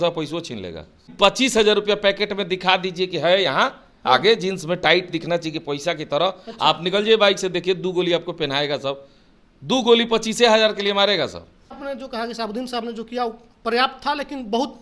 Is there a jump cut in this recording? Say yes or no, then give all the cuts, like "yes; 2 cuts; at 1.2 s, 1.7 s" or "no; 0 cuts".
yes; 2 cuts; at 1.1 s, 11.7 s